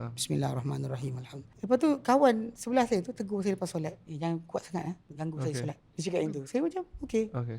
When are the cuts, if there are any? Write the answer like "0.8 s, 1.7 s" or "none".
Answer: 1.4 s, 4.0 s, 5.1 s, 5.9 s